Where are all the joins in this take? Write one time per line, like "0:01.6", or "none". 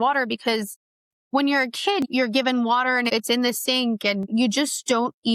0:02.0
0:03.1
0:04.3